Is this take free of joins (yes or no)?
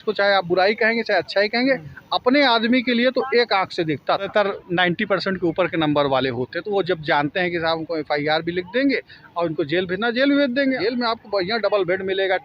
no